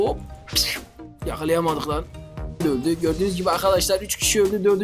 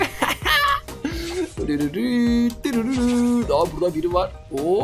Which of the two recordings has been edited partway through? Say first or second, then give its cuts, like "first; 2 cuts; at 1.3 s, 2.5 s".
first; 1 cut; at 2.6 s